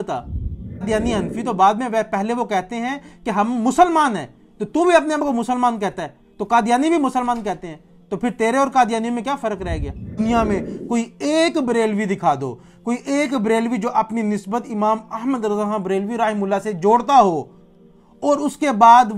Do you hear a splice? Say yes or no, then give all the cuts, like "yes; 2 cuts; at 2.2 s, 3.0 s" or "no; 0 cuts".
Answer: yes; 2 cuts; at 0.9 s, 10.2 s